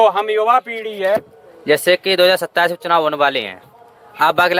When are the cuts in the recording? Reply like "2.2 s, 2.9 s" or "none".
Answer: none